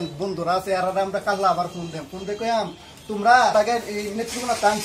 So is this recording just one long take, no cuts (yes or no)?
no